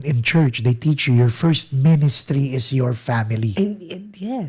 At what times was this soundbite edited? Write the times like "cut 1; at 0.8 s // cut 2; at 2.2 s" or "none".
none